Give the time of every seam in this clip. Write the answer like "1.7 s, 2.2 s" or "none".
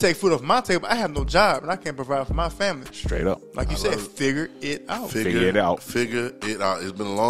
none